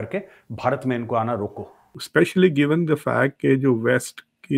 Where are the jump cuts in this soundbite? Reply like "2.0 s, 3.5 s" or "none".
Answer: 2.0 s